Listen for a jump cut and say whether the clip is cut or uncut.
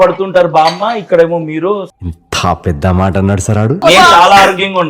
cut